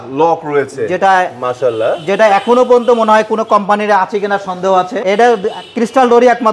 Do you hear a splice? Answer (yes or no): yes